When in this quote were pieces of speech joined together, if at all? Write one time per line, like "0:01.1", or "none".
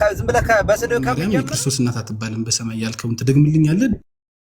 0:01.2